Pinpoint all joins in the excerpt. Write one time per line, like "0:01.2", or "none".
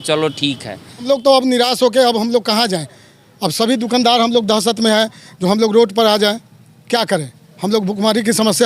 0:01.0